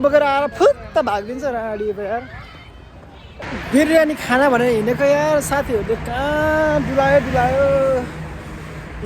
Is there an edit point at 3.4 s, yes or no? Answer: yes